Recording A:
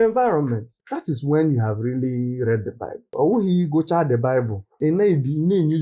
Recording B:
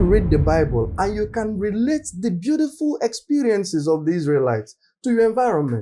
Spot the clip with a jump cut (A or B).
A